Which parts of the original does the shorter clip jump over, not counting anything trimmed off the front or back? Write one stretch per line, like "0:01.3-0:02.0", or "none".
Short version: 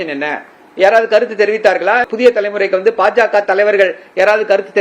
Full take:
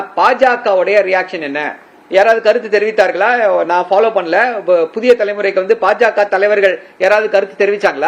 0:03.4-0:04.9

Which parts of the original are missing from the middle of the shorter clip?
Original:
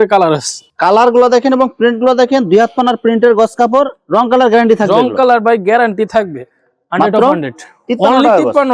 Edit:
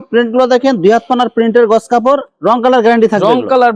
none

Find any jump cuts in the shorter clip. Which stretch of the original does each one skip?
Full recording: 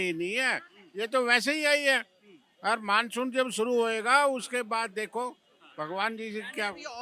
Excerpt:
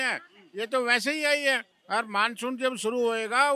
0:02.1-0:02.5

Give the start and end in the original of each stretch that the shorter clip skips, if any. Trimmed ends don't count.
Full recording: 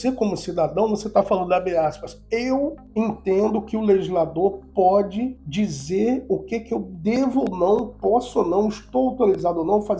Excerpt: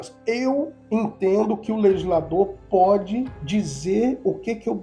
none

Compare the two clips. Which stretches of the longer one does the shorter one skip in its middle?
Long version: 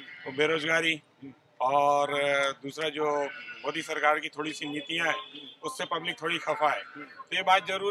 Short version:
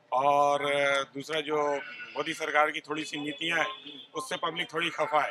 none

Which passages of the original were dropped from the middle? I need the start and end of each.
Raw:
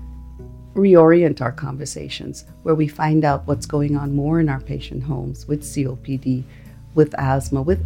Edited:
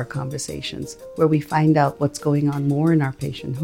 none

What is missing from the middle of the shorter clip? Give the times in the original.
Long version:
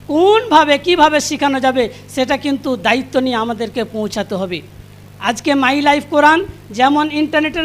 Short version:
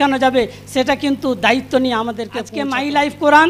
0:03.9-0:05.4

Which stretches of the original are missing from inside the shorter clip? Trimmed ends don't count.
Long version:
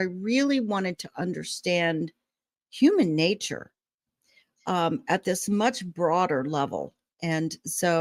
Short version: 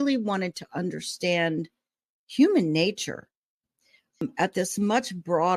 0:04.6-0:04.9

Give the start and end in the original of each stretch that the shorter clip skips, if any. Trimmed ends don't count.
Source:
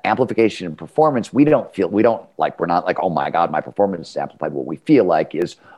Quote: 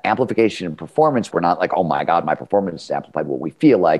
0:01.3-0:02.5

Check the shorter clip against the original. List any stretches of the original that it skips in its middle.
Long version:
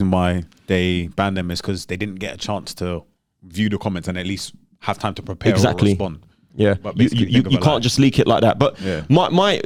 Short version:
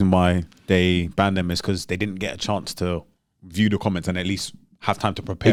none

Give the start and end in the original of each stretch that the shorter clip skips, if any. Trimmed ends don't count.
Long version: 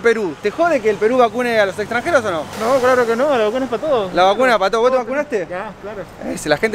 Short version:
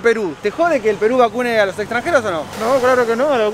none

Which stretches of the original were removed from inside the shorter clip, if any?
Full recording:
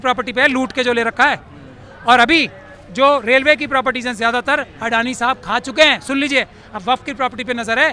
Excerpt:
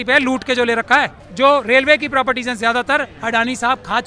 0:01.5-0:02.8

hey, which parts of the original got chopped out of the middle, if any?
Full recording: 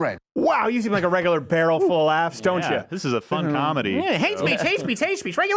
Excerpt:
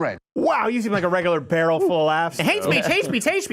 0:02.4-0:04.2

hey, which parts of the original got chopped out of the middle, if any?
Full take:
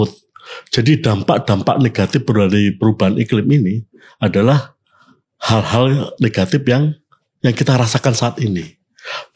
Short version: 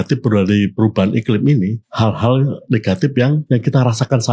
0:03.9-0:05.3
0:06.9-0:07.4

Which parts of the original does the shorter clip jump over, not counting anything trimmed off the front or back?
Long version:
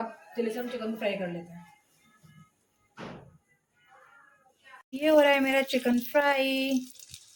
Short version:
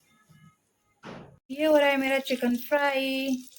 0:03.3-0:04.8

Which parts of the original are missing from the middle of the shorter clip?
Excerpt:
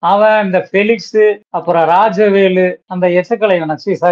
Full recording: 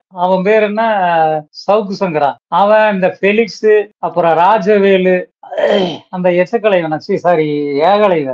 0:05.3-0:06.1

